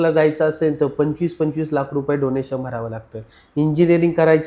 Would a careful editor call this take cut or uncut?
uncut